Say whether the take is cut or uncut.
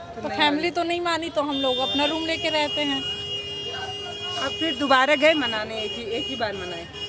uncut